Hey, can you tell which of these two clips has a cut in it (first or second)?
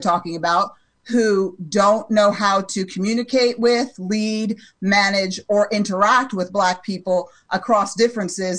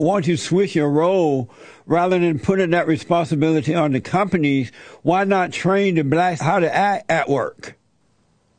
second